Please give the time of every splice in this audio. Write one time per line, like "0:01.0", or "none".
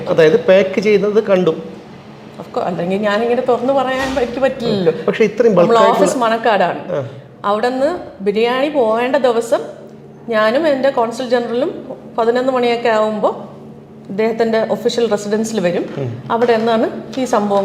none